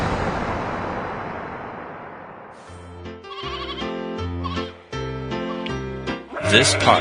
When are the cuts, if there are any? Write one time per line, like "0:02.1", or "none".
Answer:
0:02.8

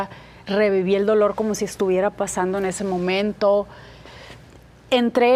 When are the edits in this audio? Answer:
none

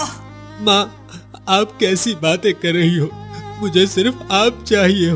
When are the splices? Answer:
none

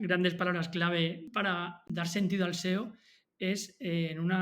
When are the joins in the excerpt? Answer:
0:01.8

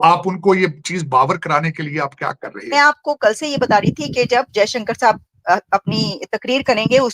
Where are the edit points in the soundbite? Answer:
0:02.5

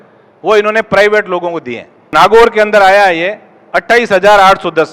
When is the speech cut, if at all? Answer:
0:02.1

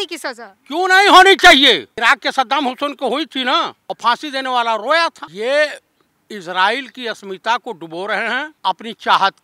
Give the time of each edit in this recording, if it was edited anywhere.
0:01.9
0:03.8
0:05.2
0:08.5

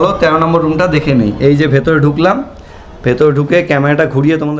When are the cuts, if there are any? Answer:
none

